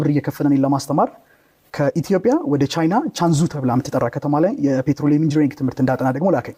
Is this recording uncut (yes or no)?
yes